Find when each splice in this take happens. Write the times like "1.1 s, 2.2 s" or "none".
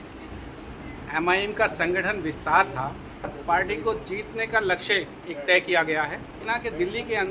3.4 s, 6.4 s